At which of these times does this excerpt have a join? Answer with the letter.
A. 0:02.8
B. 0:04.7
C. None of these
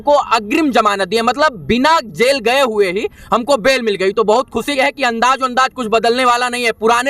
B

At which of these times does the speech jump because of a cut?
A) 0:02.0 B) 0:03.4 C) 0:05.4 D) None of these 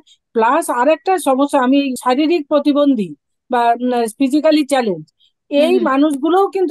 A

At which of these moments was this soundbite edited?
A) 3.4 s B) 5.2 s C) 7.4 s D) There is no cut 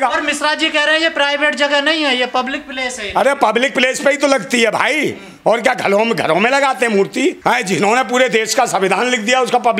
C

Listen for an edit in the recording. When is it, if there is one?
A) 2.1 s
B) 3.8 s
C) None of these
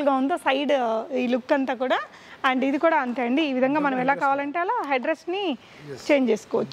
C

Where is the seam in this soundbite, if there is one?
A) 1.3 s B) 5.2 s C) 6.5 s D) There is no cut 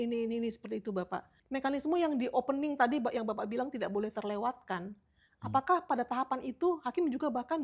A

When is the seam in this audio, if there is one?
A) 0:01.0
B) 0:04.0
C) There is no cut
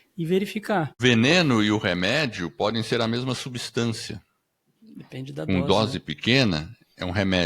A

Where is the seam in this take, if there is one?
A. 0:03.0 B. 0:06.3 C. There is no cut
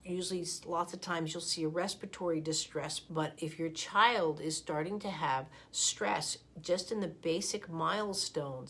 A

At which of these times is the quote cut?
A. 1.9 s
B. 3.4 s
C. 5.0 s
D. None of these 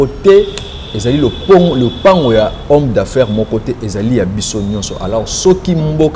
D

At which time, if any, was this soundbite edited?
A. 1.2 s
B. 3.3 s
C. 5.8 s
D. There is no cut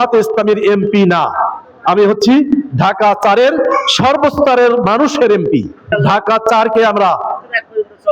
C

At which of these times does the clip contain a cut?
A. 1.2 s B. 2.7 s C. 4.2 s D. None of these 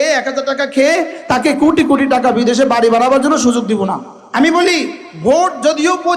C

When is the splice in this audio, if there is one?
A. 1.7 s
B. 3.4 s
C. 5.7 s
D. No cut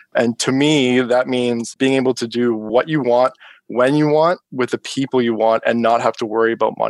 A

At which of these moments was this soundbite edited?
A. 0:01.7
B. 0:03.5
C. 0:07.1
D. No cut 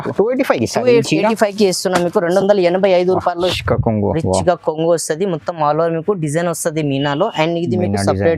B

